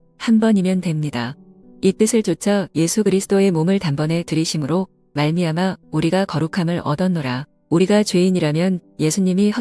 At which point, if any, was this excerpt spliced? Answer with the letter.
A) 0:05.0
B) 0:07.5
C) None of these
B